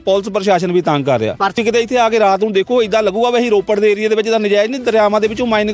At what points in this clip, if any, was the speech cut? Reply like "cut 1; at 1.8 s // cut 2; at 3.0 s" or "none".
cut 1; at 1.5 s